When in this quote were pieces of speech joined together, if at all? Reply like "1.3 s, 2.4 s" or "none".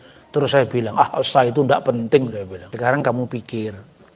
2.7 s

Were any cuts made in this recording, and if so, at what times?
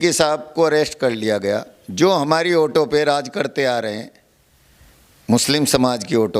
none

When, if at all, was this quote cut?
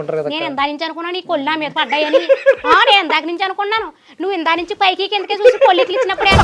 none

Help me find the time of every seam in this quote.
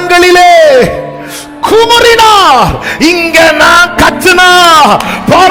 none

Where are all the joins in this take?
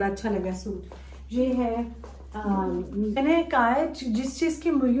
3.2 s

